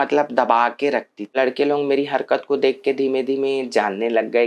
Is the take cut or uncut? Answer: cut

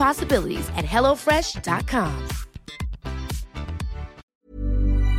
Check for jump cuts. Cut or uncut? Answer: cut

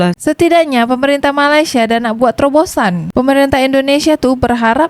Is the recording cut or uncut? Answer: uncut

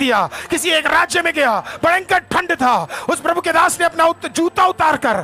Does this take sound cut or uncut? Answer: uncut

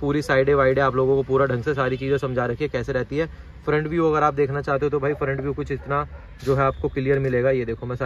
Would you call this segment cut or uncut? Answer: uncut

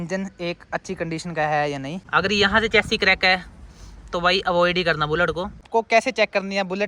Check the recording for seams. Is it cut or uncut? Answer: cut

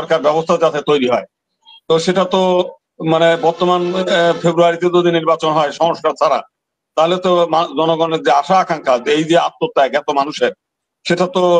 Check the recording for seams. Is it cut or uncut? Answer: uncut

